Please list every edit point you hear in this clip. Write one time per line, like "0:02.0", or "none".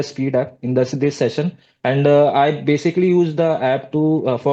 none